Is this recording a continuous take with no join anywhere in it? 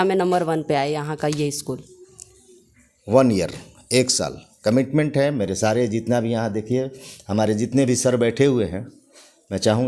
yes; 0 cuts

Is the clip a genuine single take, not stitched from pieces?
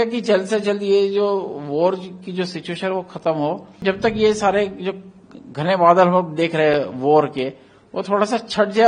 no; 1 cut; at 3.8 s

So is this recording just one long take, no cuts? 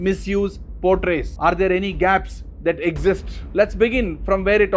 no; 1 cut; at 3.3 s

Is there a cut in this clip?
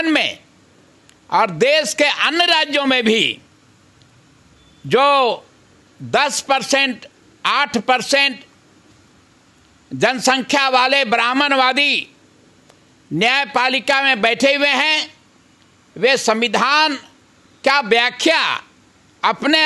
no; 0 cuts

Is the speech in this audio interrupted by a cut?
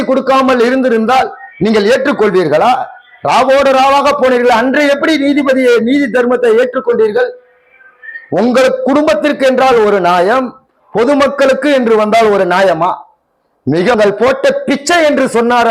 yes; 1 cut; at 13.9 s

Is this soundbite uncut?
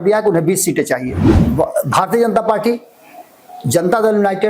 no; 1 cut; at 1.3 s

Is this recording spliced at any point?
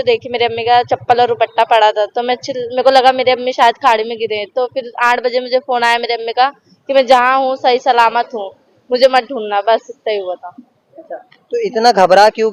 no; 0 cuts

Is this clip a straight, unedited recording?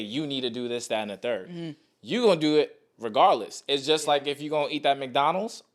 yes; 0 cuts

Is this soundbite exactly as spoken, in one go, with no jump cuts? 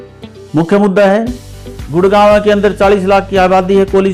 yes; 0 cuts

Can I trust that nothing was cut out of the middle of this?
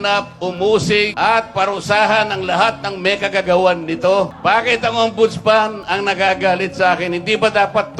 no; 2 cuts; at 1.1 s, 4.3 s

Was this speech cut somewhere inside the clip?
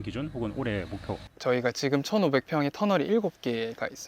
yes; 1 cut; at 1.3 s

